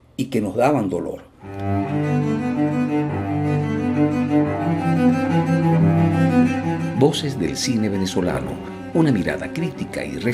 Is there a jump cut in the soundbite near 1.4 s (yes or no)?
yes